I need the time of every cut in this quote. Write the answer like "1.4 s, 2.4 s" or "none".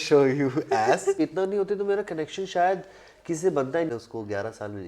1.2 s, 3.9 s